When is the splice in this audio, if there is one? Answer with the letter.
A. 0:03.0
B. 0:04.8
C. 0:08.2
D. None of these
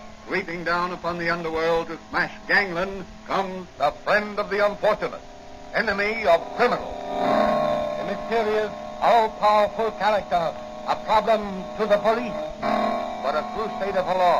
B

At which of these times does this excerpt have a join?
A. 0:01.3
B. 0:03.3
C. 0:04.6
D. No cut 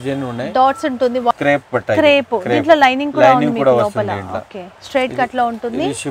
A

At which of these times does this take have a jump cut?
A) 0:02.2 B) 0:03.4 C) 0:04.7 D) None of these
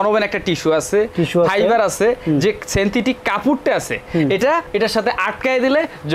D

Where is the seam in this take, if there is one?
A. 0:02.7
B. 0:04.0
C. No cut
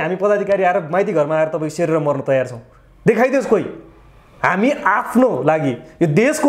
C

